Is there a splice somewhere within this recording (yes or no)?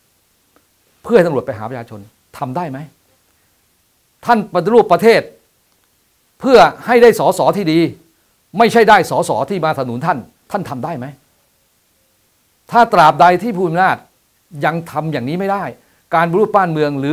no